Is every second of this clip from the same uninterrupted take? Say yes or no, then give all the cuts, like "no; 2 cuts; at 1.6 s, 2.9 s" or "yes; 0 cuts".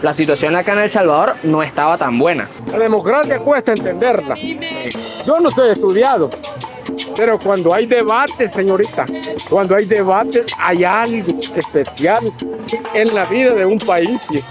no; 1 cut; at 2.6 s